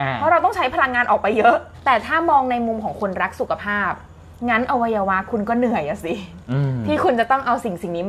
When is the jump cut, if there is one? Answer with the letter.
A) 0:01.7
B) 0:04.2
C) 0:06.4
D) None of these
A